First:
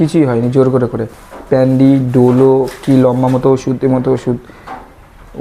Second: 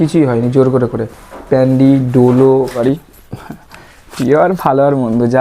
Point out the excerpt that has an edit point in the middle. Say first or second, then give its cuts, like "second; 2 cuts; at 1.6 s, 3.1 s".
second; 1 cut; at 2.8 s